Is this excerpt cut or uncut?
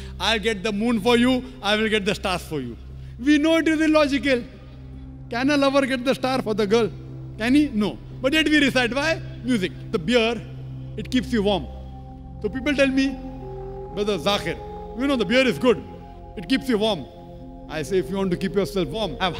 cut